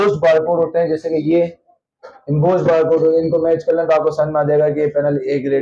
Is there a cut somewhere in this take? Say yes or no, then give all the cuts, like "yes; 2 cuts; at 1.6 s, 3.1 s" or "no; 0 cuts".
no; 0 cuts